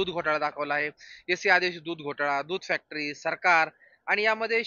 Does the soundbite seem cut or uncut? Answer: uncut